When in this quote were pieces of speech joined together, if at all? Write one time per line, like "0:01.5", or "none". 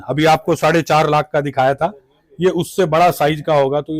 none